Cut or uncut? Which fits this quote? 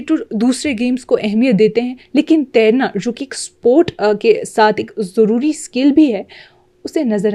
uncut